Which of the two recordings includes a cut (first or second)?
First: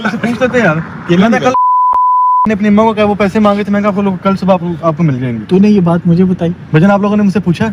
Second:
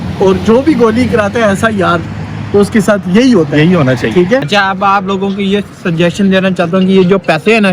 second